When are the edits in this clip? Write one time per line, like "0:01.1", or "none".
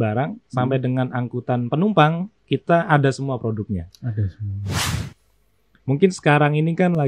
0:05.0